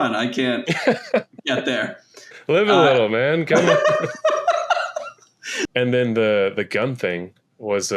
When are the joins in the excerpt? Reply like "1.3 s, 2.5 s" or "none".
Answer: 5.7 s

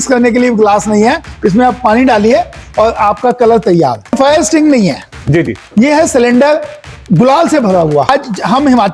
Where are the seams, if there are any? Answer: 4.1 s, 8.1 s

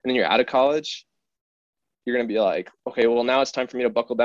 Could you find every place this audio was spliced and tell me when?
none

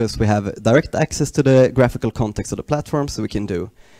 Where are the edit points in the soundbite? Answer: none

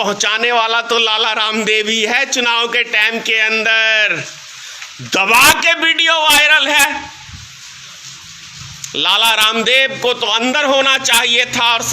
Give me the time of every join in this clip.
none

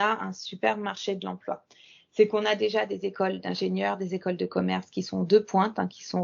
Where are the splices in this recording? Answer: none

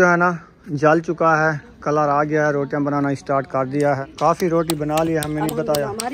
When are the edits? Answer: 4.1 s

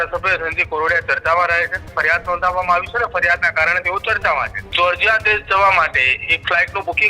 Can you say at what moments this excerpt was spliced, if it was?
1.9 s, 4.6 s

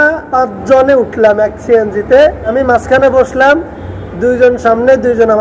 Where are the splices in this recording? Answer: 2.5 s

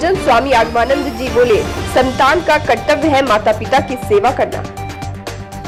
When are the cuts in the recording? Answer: none

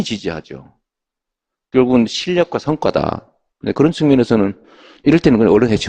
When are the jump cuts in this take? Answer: none

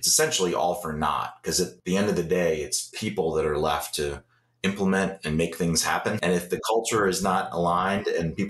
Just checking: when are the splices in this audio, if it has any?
1.8 s, 6.2 s

